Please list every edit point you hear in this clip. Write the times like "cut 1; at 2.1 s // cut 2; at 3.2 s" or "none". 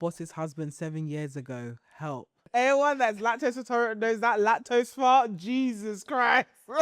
cut 1; at 2.3 s